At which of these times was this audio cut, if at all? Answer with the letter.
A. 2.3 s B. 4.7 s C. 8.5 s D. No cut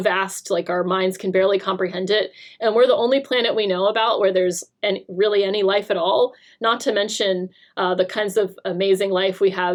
D